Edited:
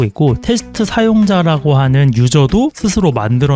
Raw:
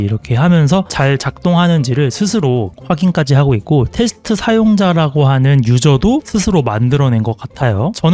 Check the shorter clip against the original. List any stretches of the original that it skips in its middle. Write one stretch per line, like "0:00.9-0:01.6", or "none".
none